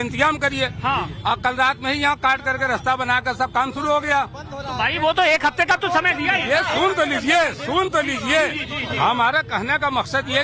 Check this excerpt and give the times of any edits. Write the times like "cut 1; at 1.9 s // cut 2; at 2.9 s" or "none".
cut 1; at 0.9 s